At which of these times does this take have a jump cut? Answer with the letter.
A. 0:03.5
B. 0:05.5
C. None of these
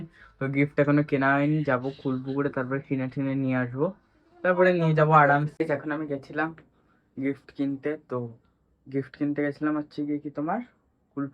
B